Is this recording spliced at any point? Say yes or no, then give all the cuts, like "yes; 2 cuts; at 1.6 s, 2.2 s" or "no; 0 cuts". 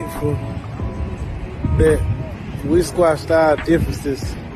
no; 0 cuts